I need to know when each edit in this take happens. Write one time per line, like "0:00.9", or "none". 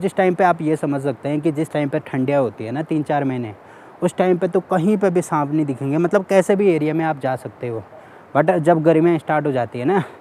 none